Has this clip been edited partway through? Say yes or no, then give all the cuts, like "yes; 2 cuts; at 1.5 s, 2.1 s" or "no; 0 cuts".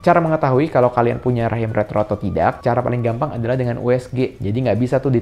no; 0 cuts